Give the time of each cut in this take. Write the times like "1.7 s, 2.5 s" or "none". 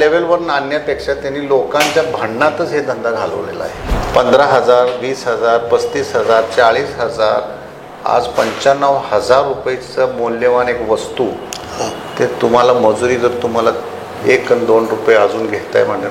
3.9 s